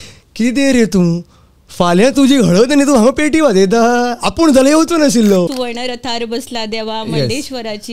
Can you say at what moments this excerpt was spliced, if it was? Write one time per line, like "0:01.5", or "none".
0:05.5